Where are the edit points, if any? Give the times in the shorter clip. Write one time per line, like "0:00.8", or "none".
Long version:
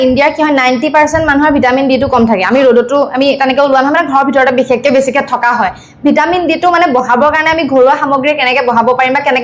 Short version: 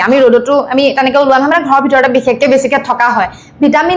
none

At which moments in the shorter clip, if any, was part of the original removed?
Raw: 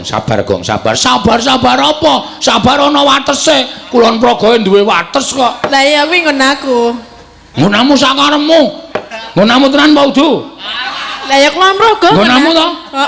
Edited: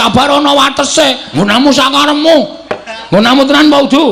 0:01.2

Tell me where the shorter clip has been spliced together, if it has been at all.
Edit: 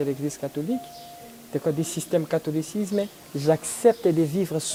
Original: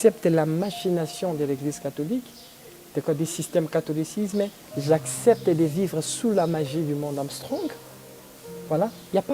none

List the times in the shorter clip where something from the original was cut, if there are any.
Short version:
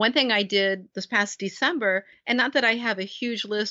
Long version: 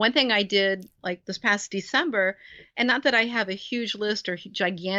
0:00.9
0:02.1

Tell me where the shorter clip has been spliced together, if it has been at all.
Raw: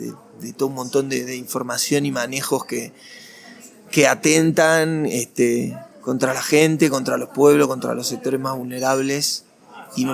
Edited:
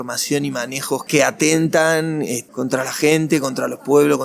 0:01.0
0:02.4

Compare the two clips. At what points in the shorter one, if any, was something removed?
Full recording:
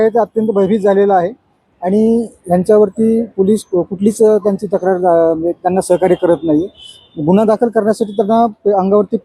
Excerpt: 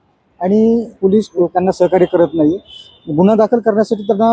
0:01.2

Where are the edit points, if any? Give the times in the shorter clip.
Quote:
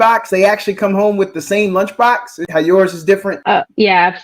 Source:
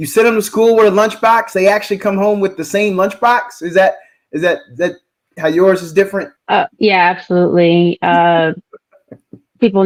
0:02.3
0:03.3

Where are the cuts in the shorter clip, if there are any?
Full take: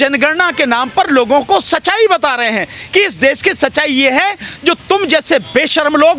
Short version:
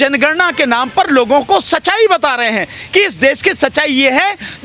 none

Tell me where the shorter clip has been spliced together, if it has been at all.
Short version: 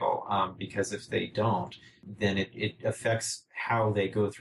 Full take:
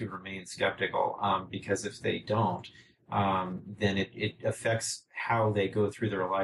0:02.0

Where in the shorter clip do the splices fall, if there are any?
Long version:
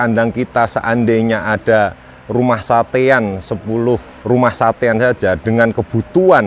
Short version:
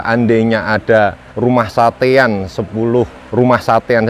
0:01.2

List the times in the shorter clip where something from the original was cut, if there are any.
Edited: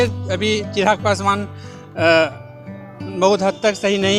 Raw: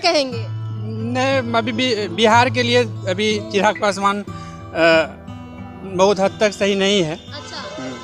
none

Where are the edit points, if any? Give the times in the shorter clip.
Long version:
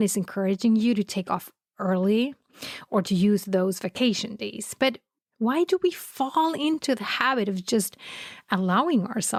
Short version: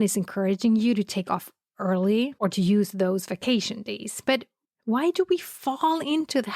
0:02.3

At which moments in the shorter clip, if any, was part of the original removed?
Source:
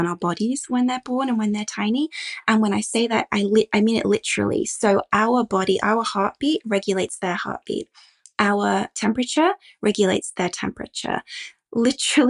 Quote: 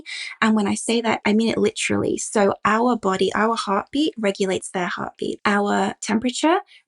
0:01.2
0:05.4

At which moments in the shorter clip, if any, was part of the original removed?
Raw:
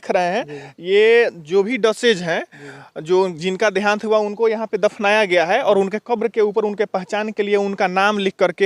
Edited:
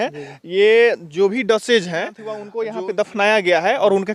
0:02.5

